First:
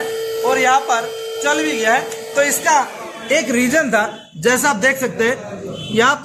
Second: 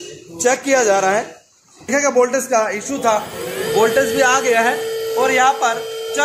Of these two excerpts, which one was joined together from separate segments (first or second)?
second